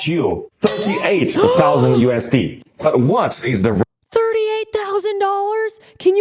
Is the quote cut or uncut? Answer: uncut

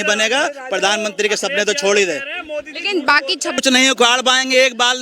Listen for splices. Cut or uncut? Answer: cut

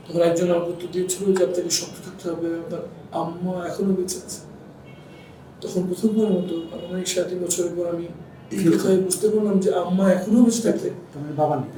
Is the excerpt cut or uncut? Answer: uncut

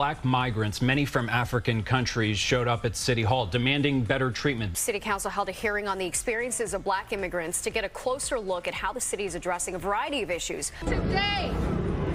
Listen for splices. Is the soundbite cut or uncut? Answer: uncut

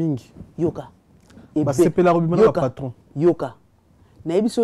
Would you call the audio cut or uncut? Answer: uncut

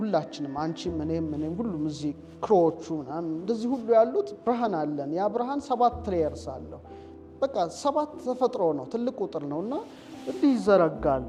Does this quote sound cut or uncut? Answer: uncut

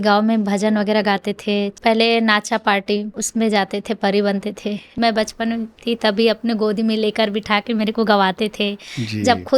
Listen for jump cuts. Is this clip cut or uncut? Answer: cut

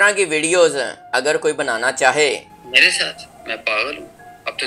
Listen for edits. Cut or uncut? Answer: cut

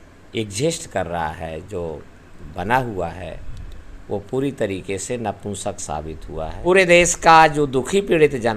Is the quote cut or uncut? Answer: cut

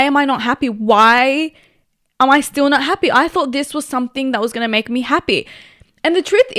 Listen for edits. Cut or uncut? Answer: uncut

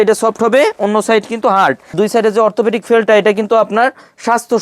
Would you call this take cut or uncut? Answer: cut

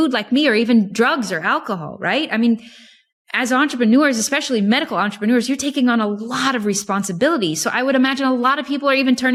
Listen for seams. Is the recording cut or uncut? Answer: uncut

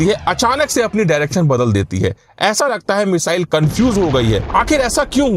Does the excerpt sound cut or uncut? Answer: cut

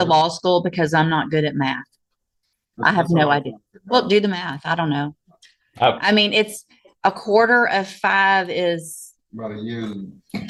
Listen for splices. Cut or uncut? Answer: uncut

